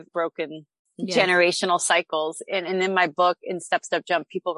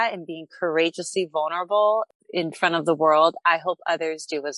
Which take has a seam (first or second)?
second